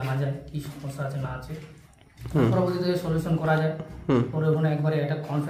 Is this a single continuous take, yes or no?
yes